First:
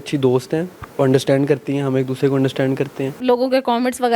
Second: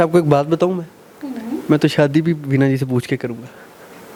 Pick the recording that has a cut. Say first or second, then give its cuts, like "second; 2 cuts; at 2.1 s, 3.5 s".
first; 1 cut; at 3.2 s